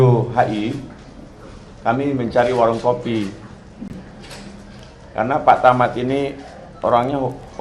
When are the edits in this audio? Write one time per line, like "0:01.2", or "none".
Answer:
0:04.4